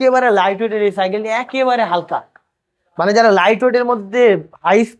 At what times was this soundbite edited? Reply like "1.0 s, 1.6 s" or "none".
none